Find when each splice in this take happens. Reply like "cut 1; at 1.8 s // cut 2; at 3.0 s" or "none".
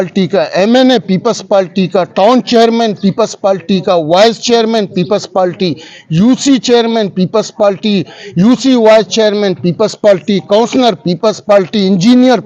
none